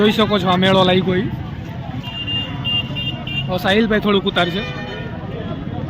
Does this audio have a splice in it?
no; 0 cuts

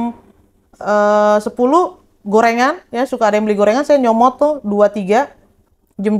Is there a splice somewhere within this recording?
no; 0 cuts

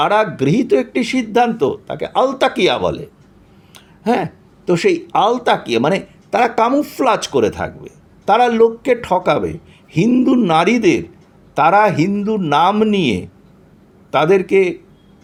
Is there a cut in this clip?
no; 0 cuts

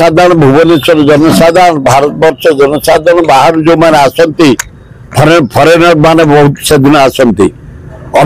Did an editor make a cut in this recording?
no; 0 cuts

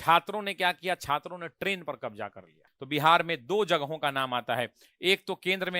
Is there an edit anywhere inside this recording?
yes; 1 cut; at 2.7 s

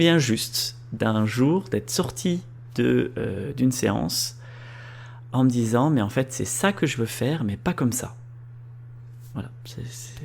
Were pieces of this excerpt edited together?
no; 0 cuts

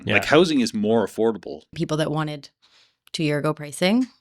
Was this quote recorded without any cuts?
no; 1 cut; at 1.7 s

